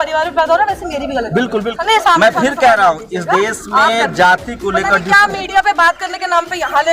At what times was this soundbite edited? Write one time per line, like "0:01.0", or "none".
0:01.6